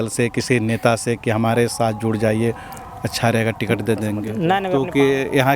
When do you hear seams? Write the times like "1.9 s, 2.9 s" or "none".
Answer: 4.6 s